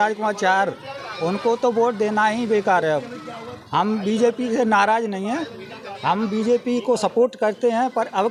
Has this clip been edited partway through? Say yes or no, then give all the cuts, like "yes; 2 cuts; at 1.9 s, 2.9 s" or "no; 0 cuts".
no; 0 cuts